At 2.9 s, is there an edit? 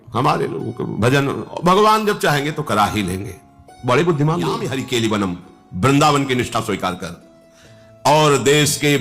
no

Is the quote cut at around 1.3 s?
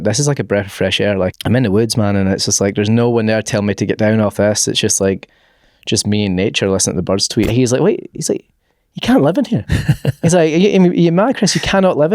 yes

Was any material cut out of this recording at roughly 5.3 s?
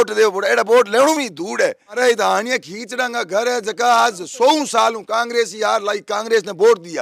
no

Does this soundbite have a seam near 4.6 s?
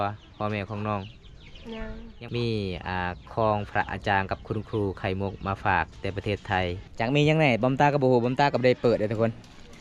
no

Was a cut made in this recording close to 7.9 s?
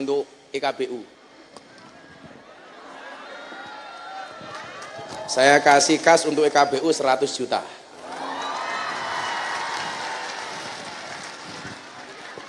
no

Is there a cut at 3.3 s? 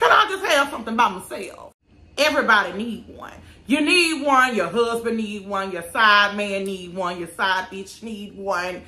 no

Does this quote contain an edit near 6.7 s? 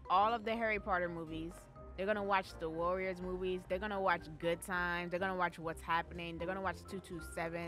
no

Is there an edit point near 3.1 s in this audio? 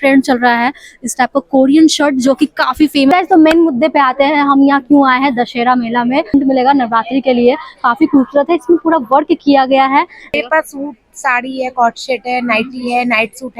yes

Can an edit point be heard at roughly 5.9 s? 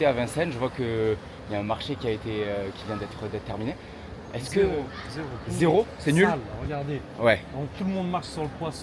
no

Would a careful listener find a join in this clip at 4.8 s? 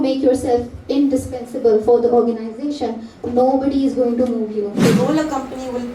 yes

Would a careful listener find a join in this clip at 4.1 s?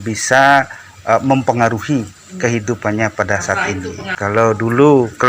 yes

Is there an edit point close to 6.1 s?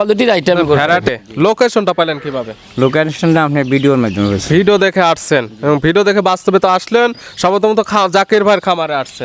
no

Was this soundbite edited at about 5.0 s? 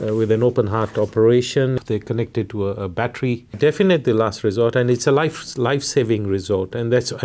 no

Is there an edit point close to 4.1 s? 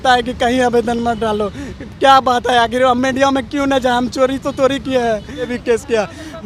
no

